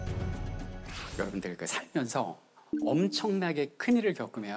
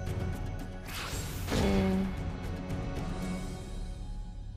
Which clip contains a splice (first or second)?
first